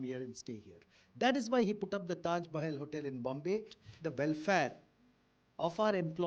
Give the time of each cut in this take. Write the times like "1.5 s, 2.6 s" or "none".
3.9 s